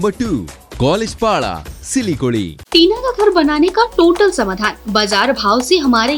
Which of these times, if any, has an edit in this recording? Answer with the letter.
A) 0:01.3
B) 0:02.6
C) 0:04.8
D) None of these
B